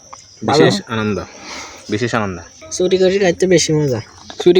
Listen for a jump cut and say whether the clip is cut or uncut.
cut